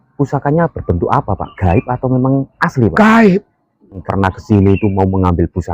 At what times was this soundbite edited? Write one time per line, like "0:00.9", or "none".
0:04.0